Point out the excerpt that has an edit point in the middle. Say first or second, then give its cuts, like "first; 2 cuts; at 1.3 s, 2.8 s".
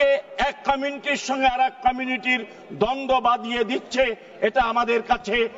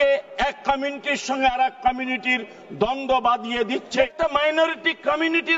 second; 1 cut; at 4.1 s